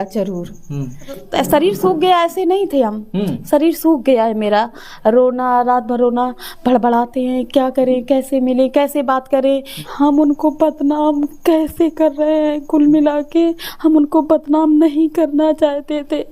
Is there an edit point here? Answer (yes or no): yes